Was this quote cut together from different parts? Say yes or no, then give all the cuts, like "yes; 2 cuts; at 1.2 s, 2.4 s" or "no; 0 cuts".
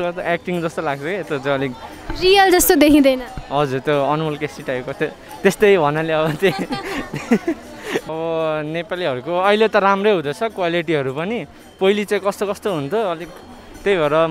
no; 0 cuts